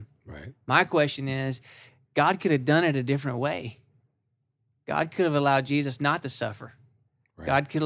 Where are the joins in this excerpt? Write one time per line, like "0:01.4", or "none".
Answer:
none